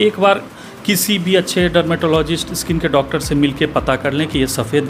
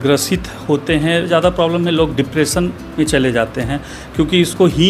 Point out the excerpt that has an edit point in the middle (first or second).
second